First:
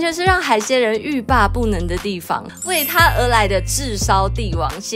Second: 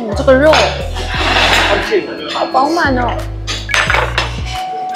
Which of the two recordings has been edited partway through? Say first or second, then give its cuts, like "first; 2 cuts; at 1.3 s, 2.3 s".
first; 1 cut; at 2.4 s